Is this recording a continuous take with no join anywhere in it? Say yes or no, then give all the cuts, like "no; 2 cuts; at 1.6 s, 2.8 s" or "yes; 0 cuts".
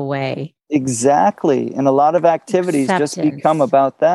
yes; 0 cuts